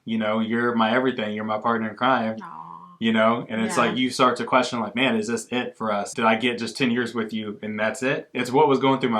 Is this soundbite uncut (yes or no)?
no